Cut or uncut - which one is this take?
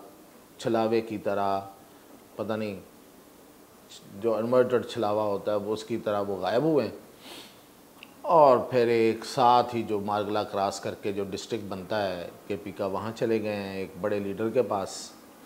uncut